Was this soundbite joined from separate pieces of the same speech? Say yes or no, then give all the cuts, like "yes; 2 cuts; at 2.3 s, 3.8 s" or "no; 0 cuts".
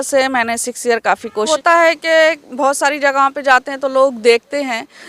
yes; 1 cut; at 1.5 s